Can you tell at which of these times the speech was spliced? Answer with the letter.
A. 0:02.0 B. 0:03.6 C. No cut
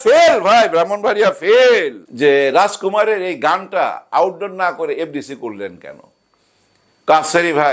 A